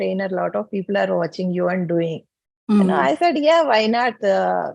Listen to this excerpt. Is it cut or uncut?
uncut